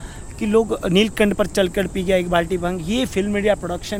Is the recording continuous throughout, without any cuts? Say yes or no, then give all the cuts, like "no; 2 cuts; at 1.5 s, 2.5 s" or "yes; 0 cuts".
yes; 0 cuts